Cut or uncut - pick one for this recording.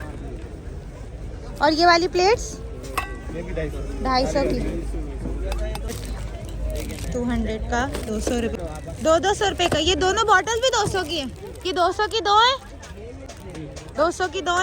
cut